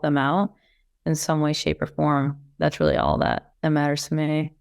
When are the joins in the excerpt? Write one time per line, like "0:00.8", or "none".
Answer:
0:03.5